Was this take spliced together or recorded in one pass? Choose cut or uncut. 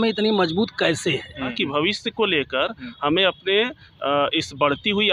cut